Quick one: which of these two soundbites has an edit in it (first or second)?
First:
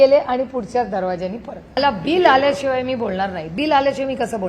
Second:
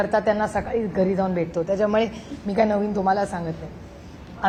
first